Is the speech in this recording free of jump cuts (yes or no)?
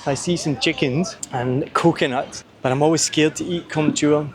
no